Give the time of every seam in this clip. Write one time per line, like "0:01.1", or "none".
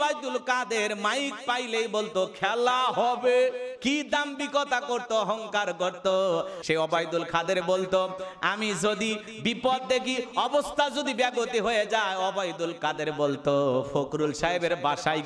0:06.5